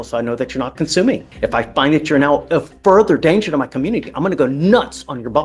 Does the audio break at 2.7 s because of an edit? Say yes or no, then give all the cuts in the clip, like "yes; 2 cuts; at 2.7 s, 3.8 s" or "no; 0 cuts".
no; 1 cut; at 1.3 s